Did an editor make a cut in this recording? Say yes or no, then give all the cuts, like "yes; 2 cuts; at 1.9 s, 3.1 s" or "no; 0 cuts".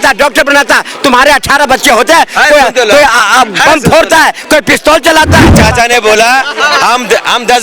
yes; 1 cut; at 5.6 s